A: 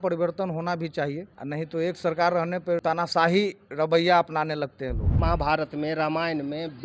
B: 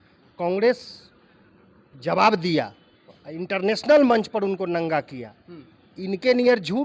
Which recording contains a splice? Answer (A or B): A